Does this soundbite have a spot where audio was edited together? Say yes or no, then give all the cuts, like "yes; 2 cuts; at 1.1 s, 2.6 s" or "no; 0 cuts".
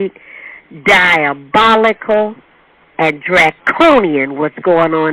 no; 0 cuts